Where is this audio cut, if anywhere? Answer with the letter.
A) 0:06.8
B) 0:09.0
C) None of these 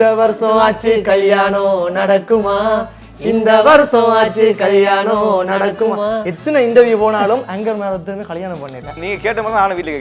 B